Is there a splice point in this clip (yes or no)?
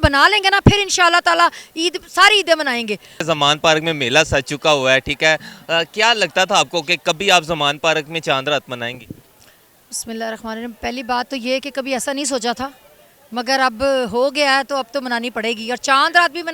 yes